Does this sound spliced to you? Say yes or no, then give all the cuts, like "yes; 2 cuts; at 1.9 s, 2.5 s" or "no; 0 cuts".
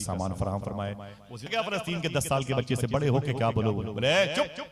yes; 1 cut; at 1.5 s